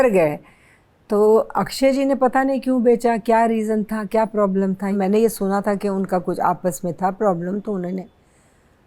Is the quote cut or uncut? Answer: cut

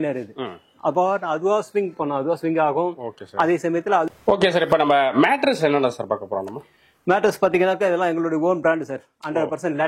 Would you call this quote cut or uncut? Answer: cut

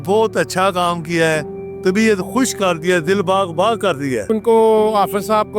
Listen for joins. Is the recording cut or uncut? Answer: cut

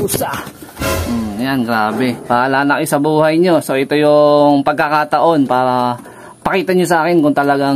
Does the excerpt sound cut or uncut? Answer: cut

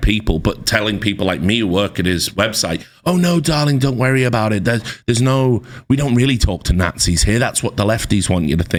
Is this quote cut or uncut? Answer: uncut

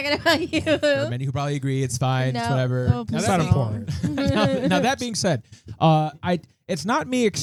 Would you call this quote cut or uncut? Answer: uncut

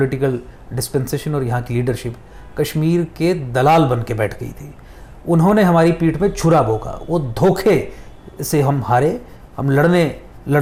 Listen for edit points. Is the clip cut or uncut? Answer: uncut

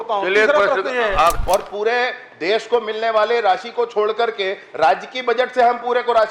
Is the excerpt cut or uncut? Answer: cut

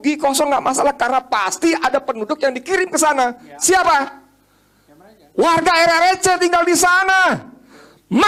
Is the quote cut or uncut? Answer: uncut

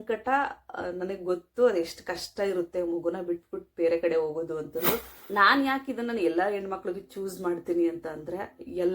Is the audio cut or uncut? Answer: cut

